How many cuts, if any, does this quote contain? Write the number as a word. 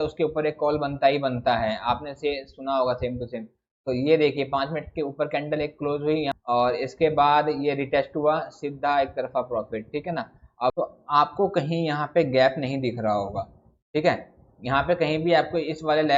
two